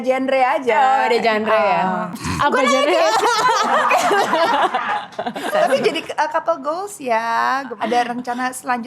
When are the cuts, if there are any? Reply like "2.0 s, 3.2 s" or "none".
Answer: 2.2 s, 5.5 s, 7.7 s